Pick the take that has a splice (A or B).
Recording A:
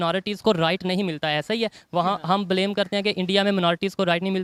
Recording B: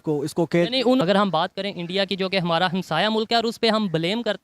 B